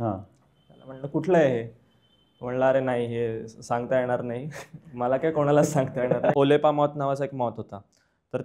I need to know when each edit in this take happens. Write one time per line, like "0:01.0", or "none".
0:06.3